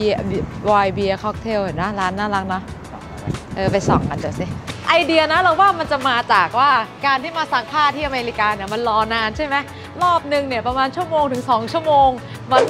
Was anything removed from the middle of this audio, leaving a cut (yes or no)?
yes